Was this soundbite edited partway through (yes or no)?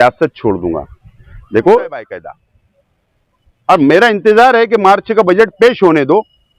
yes